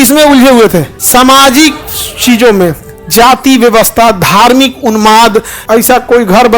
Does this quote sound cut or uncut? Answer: cut